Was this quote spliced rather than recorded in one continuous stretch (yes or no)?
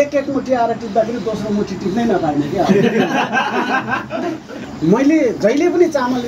yes